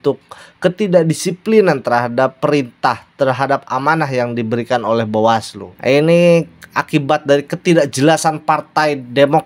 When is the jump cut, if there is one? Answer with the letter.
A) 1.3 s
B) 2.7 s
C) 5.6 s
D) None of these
C